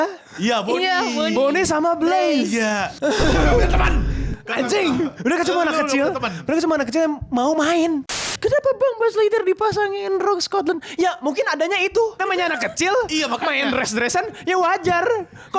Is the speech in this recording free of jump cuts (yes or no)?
no